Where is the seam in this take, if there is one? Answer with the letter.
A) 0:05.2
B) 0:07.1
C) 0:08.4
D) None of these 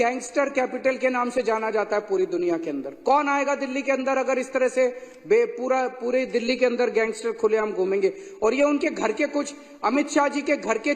D